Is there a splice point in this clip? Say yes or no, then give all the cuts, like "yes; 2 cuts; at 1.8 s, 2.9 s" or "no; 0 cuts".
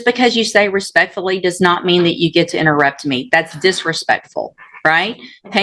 no; 0 cuts